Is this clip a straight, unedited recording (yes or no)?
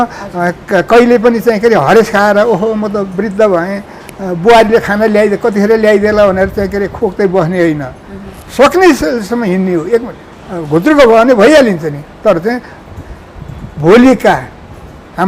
yes